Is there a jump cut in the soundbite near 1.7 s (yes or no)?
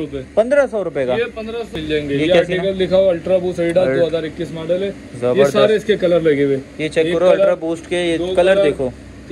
yes